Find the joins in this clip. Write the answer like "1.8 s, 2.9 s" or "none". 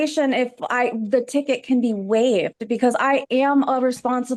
none